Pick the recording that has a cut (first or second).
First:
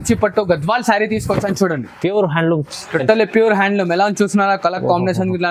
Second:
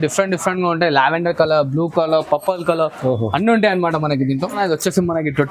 second